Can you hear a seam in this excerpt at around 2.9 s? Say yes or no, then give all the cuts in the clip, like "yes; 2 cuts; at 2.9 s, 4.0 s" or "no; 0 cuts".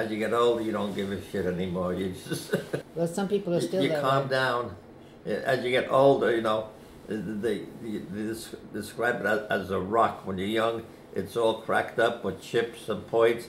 yes; 1 cut; at 2.9 s